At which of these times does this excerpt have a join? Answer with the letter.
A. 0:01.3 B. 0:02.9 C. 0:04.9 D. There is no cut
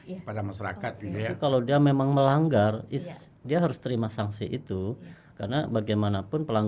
A